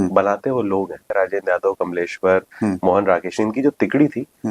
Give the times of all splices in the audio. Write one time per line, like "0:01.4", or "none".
0:01.1